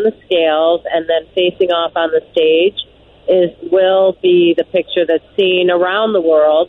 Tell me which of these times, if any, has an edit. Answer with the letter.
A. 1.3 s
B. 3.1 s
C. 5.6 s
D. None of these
D